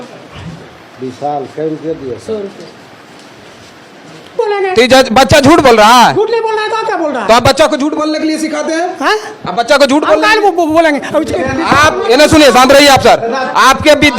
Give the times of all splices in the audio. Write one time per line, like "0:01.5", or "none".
0:04.4